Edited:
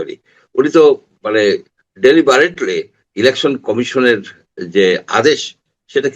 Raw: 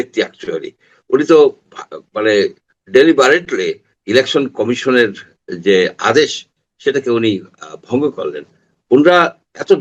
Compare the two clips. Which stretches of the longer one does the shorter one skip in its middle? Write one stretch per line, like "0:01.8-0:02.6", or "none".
0:01.7-0:02.0